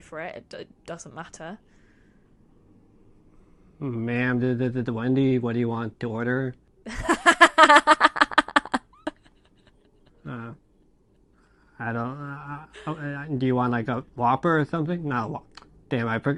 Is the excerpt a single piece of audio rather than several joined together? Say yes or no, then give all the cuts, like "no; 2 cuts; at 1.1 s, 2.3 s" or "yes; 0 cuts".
yes; 0 cuts